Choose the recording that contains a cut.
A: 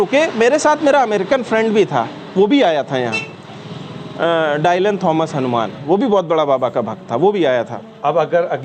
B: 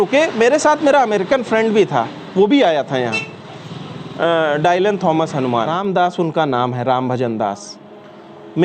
B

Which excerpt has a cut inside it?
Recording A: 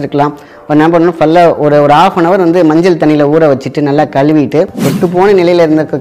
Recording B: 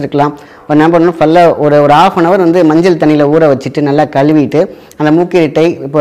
A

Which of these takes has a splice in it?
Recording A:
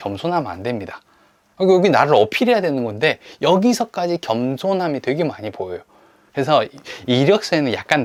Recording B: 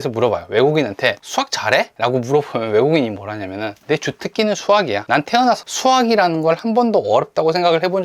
B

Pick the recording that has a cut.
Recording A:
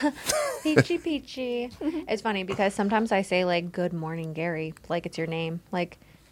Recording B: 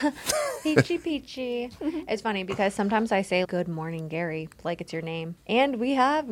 B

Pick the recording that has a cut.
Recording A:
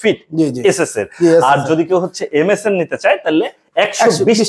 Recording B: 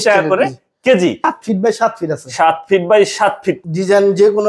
B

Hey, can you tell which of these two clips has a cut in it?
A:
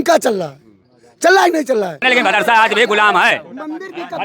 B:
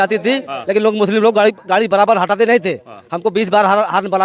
A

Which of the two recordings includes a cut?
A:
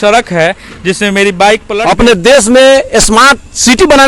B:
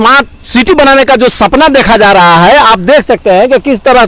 A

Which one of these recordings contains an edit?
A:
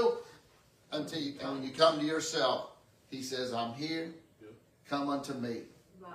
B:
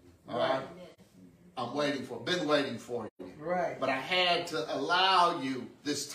A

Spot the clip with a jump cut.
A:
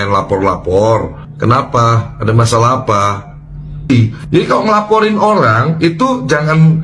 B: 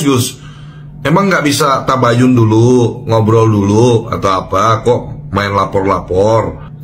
A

